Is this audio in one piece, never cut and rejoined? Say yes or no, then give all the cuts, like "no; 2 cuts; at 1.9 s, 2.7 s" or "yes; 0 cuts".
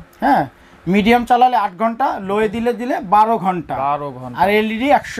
yes; 0 cuts